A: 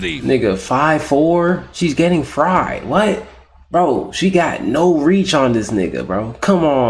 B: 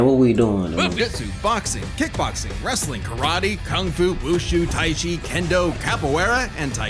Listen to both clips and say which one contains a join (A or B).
B